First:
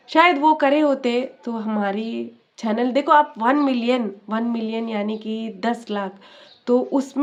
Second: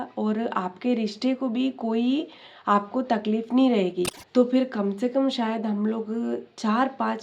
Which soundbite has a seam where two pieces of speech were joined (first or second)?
second